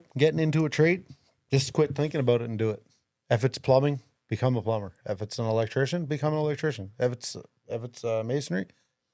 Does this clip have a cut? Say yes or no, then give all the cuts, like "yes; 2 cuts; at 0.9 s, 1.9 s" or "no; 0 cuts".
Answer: no; 0 cuts